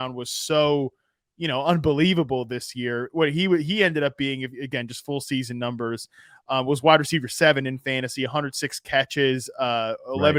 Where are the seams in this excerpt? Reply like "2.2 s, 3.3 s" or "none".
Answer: none